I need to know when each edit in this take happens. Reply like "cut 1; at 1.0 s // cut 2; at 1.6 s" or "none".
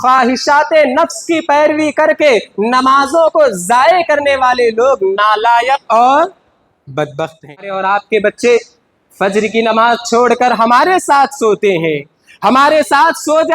cut 1; at 7.8 s